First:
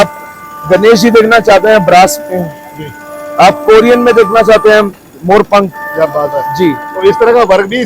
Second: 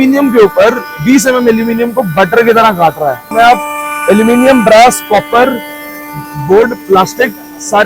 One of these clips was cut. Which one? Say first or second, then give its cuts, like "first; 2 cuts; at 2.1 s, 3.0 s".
second; 1 cut; at 3.3 s